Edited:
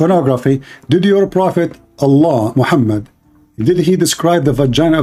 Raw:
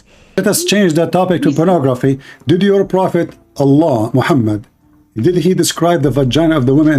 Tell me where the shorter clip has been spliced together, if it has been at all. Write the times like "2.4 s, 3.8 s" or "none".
none